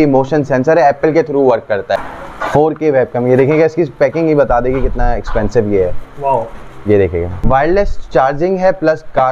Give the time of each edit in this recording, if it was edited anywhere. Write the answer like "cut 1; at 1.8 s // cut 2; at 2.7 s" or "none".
cut 1; at 2.0 s // cut 2; at 7.3 s